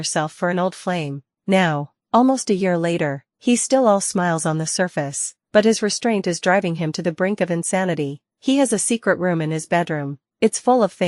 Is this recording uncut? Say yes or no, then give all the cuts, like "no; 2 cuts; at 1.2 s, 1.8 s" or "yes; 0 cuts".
no; 1 cut; at 1.3 s